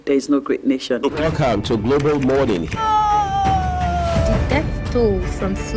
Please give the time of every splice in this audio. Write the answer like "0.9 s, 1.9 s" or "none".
1.2 s